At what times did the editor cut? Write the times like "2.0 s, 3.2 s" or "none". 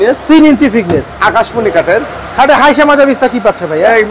none